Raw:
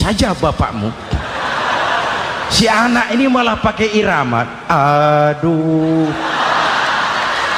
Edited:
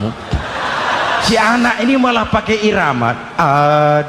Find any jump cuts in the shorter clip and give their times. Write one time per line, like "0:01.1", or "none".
0:01.3

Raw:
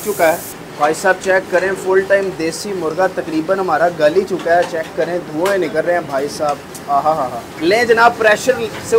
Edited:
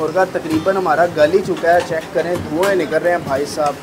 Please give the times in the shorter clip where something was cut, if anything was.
none

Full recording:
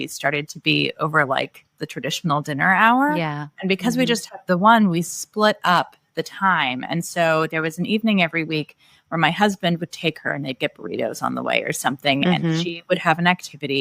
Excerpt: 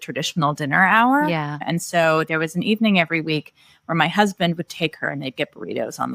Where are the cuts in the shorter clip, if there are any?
0:01.6

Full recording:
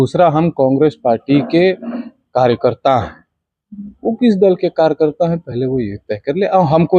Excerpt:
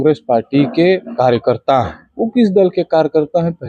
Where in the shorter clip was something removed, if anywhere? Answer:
0:01.1
0:02.0

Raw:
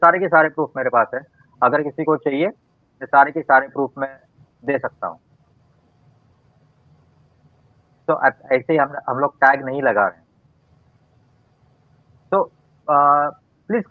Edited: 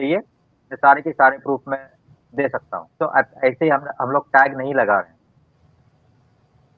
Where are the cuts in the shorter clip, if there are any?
0:02.9

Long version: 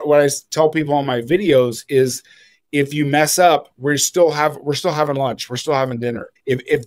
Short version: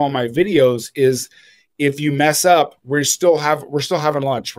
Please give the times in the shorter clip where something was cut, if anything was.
none

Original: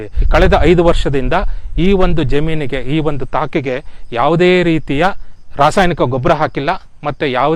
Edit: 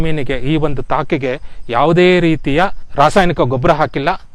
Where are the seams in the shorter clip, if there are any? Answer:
0:02.8

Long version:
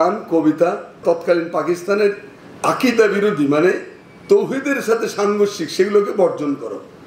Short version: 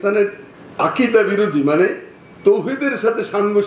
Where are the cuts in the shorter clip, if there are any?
none

